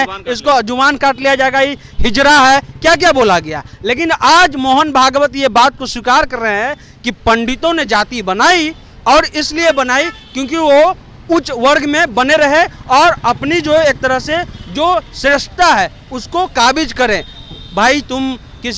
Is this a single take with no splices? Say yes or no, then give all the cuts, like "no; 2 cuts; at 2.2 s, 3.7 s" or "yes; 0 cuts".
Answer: yes; 0 cuts